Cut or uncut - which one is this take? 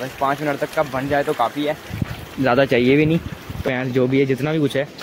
cut